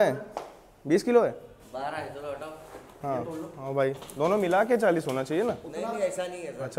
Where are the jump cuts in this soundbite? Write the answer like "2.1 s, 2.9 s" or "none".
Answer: none